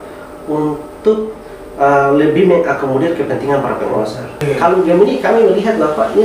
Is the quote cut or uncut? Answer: cut